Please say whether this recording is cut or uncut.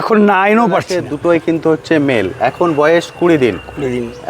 cut